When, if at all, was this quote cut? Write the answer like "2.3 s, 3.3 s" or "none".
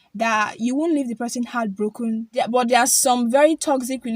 2.3 s